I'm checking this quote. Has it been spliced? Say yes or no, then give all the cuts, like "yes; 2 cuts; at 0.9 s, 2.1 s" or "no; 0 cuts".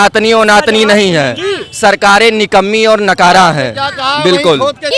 no; 0 cuts